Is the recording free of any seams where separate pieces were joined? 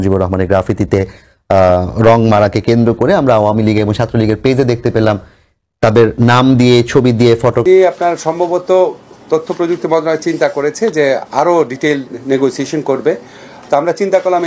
no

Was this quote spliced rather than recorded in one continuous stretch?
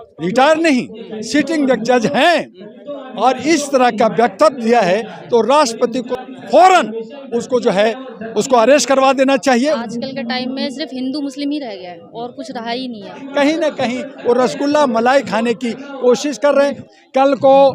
yes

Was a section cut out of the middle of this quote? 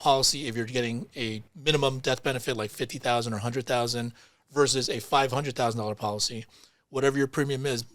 yes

